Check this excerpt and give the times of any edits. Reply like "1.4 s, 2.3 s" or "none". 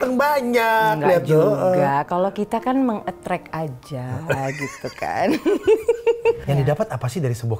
6.4 s